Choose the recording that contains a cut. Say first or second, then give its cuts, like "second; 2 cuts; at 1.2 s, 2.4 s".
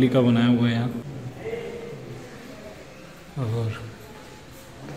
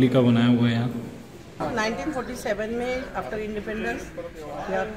second; 1 cut; at 1.6 s